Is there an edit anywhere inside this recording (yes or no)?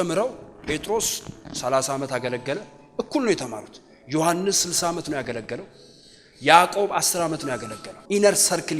yes